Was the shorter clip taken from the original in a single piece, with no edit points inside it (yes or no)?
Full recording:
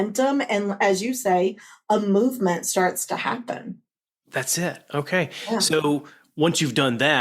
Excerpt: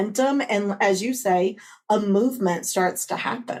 yes